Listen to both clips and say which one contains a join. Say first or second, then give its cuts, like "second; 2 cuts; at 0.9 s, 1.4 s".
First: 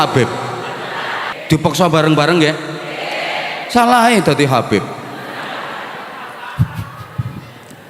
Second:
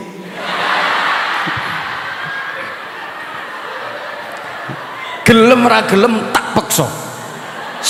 first; 1 cut; at 1.3 s